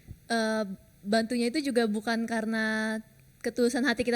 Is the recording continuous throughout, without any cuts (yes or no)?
yes